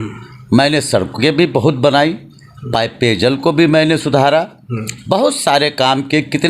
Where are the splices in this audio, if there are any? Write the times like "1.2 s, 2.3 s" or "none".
none